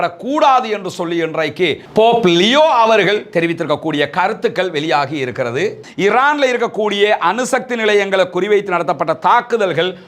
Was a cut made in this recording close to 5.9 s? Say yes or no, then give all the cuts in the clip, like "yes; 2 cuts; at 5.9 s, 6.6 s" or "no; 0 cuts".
yes; 1 cut; at 5.9 s